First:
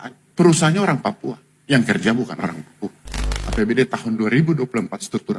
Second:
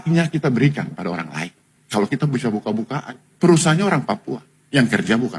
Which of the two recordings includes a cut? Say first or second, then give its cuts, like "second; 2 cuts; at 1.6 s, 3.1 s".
first; 1 cut; at 3.4 s